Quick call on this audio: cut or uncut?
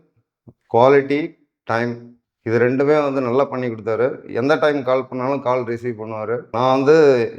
cut